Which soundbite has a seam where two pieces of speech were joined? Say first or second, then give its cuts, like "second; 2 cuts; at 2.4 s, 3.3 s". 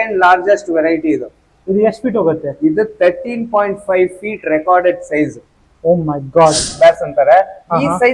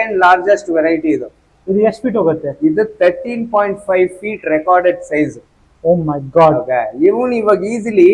first; 1 cut; at 6.7 s